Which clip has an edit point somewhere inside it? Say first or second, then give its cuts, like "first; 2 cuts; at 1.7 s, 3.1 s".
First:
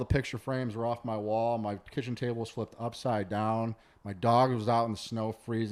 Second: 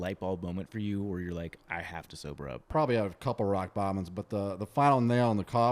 second; 1 cut; at 2.7 s